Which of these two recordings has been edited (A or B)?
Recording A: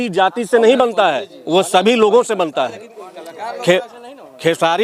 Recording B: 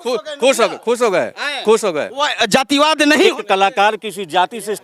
B